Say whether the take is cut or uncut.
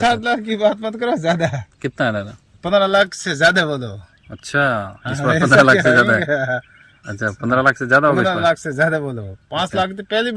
uncut